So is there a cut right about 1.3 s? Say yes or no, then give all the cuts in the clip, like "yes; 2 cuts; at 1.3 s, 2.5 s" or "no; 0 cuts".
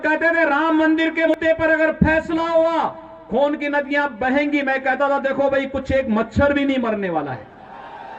yes; 1 cut; at 1.3 s